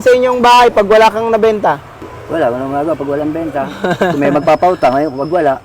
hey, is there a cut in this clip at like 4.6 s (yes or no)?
no